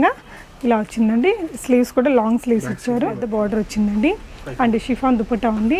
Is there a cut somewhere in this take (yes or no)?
yes